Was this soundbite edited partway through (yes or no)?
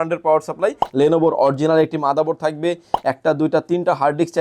yes